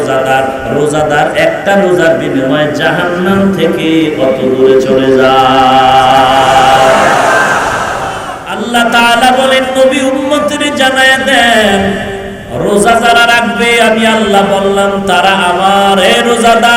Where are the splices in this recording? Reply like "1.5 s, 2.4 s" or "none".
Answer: 8.6 s